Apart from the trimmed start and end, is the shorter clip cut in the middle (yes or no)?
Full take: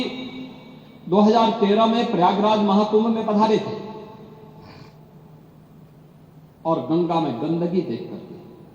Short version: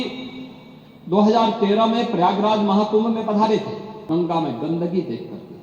yes